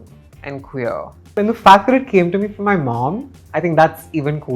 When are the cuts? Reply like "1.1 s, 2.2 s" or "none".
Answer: 1.4 s